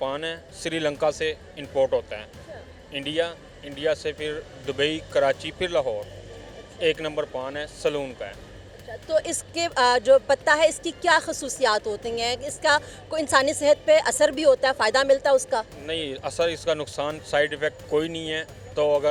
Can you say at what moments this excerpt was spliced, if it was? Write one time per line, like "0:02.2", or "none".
none